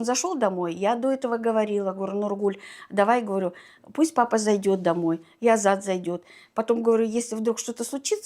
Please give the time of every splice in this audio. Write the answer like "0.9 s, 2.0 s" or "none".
none